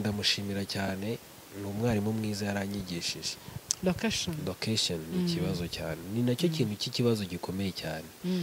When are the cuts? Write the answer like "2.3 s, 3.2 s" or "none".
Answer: 3.4 s